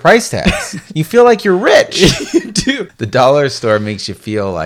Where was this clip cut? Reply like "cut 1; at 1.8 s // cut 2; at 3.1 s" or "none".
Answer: cut 1; at 2.9 s